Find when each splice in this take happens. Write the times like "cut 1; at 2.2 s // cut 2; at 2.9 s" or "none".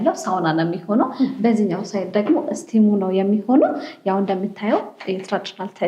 none

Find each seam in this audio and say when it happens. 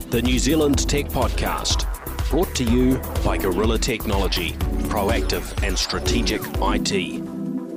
none

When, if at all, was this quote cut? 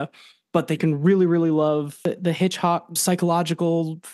cut 1; at 2.0 s

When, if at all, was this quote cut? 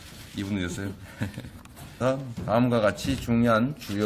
none

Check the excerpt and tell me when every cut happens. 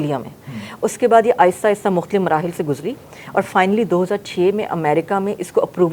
none

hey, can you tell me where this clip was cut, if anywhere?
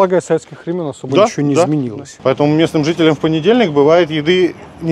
cut 1; at 2.0 s

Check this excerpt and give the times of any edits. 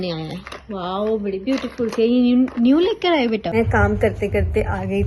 cut 1; at 3.5 s

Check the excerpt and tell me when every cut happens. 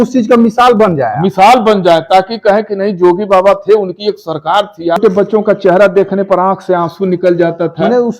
cut 1; at 5.0 s

